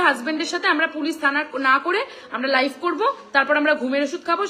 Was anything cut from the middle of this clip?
no; 0 cuts

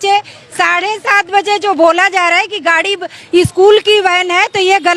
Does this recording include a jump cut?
no; 0 cuts

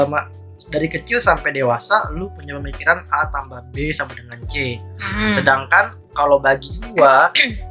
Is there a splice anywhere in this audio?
no; 0 cuts

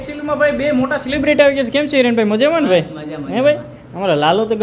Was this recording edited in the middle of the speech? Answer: no; 0 cuts

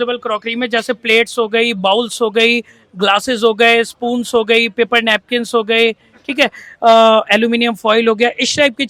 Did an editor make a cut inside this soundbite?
no; 0 cuts

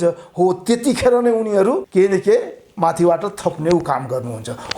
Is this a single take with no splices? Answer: no; 1 cut; at 1.8 s

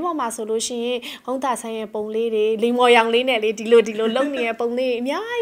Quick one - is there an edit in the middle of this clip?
no; 0 cuts

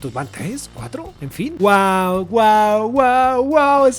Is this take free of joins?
no; 1 cut; at 1.5 s

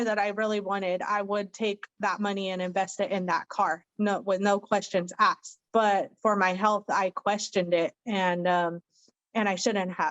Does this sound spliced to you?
yes; 1 cut; at 5.5 s

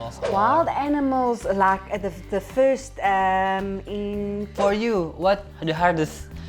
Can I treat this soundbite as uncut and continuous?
no; 1 cut; at 4.5 s

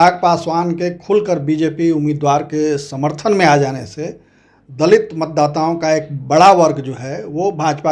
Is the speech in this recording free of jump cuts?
yes; 0 cuts

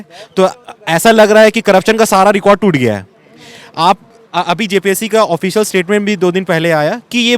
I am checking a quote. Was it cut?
no; 0 cuts

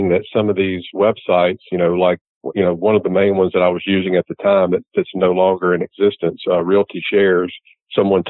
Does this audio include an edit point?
no; 0 cuts

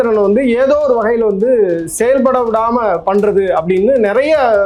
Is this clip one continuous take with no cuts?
yes; 0 cuts

